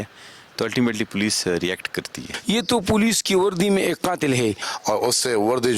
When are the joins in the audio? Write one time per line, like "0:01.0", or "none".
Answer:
0:02.3
0:04.7